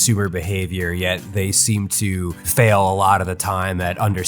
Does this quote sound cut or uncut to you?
cut